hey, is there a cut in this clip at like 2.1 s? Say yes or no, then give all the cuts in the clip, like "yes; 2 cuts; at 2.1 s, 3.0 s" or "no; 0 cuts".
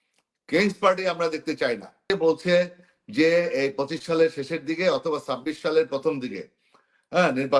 yes; 1 cut; at 2.1 s